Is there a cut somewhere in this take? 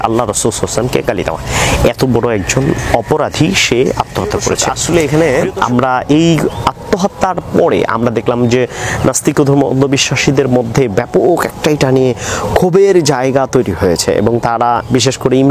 yes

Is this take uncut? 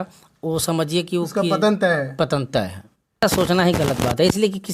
no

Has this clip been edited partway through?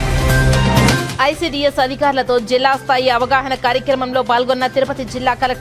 yes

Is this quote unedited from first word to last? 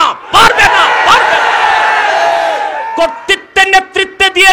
no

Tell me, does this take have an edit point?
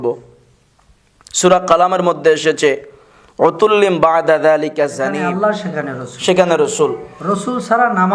yes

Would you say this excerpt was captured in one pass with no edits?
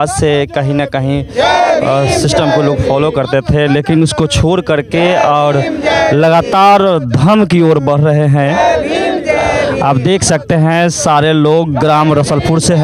yes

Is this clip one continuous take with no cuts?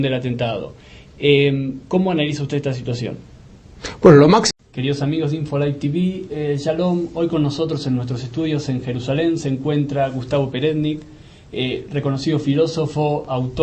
yes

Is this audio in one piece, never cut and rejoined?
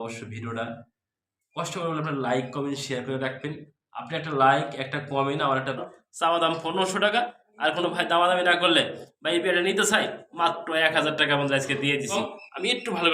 no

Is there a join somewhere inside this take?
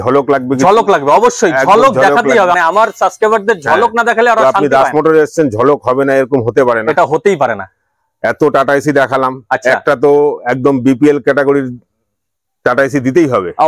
no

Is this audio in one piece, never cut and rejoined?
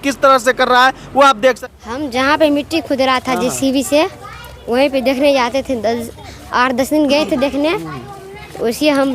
no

